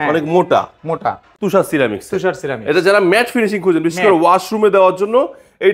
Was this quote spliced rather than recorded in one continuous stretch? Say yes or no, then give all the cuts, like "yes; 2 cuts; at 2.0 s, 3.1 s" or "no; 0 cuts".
yes; 1 cut; at 1.2 s